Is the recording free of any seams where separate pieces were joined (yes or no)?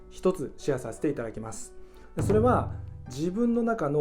yes